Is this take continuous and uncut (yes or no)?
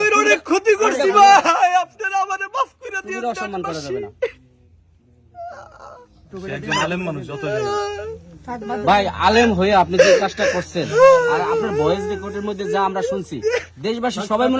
yes